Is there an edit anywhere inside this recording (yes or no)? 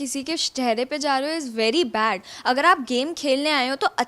no